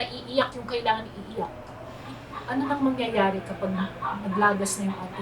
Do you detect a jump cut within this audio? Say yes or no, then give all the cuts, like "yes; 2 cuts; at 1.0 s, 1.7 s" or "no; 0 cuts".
yes; 1 cut; at 2.0 s